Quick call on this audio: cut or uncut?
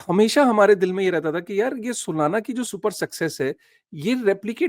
cut